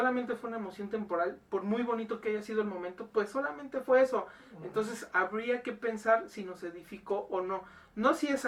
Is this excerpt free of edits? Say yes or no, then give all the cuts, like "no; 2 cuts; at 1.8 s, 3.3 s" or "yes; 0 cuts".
yes; 0 cuts